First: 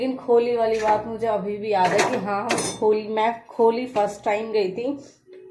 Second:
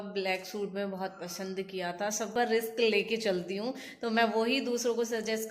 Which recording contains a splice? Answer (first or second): second